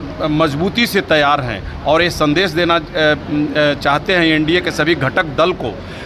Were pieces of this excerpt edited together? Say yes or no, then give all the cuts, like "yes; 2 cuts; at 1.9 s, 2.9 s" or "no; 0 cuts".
no; 0 cuts